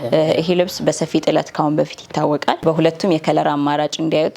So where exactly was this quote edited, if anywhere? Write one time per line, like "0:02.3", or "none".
0:02.6